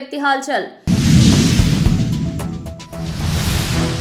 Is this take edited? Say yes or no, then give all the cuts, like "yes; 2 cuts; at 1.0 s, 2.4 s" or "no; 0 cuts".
no; 0 cuts